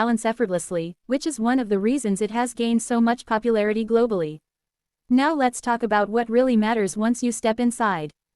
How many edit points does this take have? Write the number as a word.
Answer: one